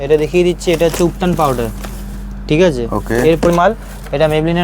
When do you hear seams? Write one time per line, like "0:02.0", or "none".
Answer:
0:03.5